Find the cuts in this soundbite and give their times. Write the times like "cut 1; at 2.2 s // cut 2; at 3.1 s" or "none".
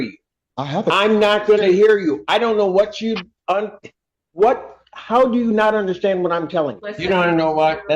cut 1; at 6.9 s